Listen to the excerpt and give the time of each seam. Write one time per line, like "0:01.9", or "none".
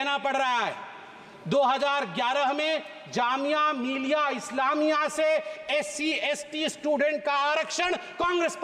none